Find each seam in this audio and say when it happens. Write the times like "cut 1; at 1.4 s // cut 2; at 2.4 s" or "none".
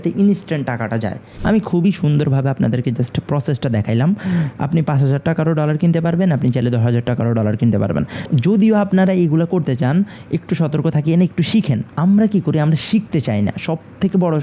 cut 1; at 1.3 s // cut 2; at 8.3 s // cut 3; at 11.9 s

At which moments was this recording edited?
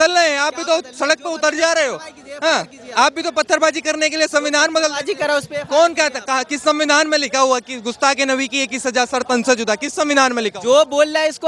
none

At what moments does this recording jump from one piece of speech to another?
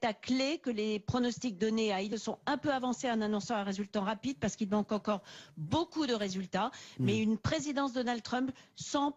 none

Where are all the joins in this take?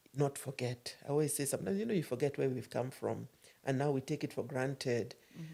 none

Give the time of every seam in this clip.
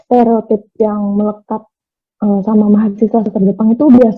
none

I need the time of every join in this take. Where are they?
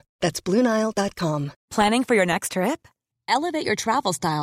cut 1; at 1.6 s

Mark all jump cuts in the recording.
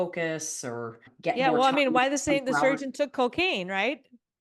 cut 1; at 1.1 s

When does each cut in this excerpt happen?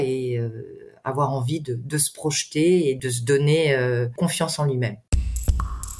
cut 1; at 3.0 s // cut 2; at 4.2 s // cut 3; at 5.0 s

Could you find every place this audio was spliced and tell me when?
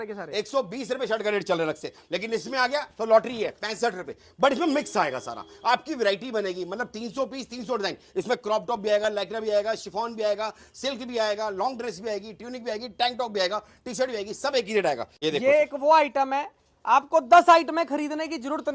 cut 1; at 15.1 s

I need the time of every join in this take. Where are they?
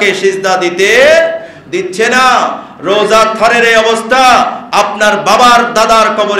none

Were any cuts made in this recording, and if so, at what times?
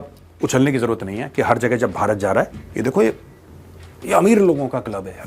none

